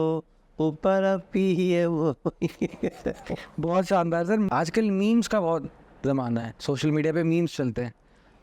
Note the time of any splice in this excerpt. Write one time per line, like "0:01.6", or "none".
0:04.5